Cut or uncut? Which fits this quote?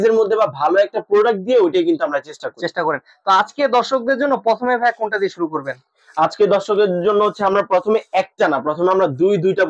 uncut